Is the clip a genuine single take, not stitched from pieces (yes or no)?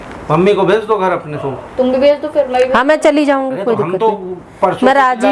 no